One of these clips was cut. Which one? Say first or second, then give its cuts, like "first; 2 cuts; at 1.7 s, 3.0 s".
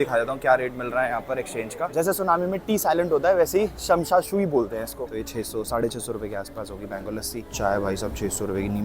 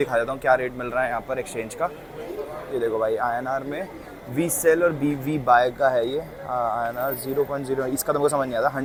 first; 3 cuts; at 1.9 s, 4.9 s, 7.5 s